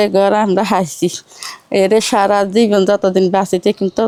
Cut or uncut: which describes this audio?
uncut